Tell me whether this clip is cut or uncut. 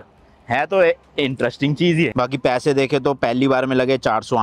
cut